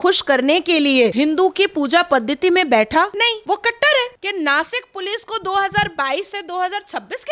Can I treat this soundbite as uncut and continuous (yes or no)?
no